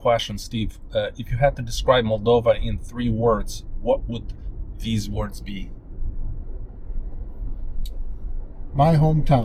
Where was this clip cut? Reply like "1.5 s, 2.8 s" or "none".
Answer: none